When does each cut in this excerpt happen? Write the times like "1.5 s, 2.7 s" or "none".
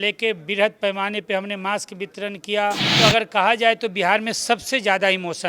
2.9 s